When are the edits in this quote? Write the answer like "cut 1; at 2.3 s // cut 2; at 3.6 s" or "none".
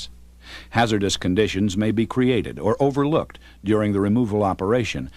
none